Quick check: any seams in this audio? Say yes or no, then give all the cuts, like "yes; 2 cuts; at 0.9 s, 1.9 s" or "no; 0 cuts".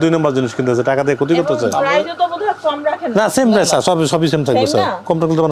no; 0 cuts